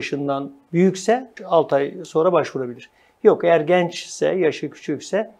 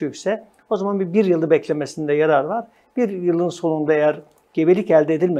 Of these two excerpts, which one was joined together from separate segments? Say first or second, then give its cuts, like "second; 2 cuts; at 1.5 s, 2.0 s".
first; 1 cut; at 1.4 s